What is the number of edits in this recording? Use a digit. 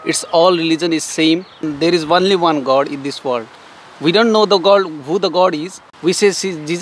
2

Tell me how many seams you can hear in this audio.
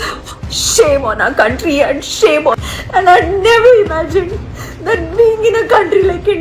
1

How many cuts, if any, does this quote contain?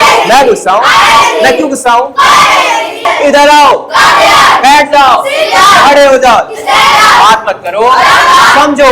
1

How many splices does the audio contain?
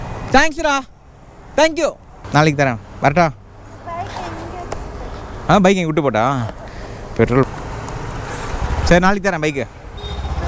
2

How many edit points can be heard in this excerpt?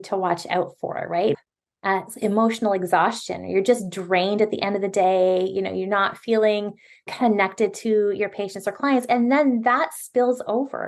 1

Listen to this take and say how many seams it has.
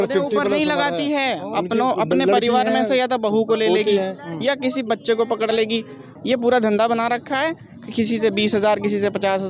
1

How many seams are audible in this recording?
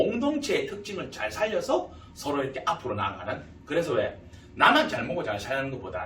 0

